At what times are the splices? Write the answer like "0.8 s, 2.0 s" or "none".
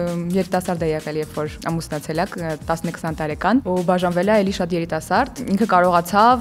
1.6 s, 3.6 s, 5.4 s